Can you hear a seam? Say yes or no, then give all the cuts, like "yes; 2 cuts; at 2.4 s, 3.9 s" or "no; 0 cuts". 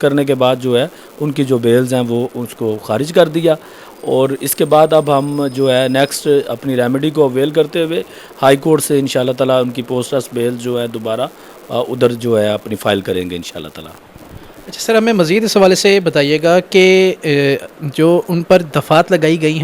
no; 0 cuts